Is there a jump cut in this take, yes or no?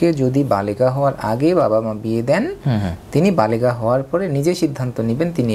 no